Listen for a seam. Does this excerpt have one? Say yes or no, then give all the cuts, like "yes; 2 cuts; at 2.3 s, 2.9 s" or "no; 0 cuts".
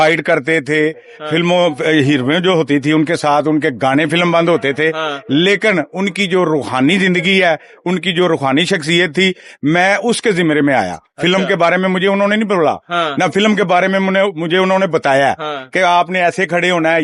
no; 0 cuts